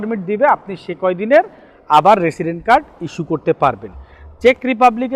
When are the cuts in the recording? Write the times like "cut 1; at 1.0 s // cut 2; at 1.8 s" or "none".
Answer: none